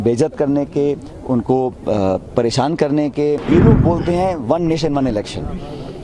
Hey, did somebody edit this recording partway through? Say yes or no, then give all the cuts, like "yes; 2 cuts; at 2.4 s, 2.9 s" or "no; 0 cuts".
yes; 1 cut; at 3.4 s